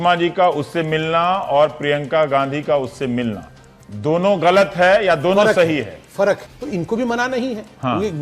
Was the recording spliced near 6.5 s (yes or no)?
yes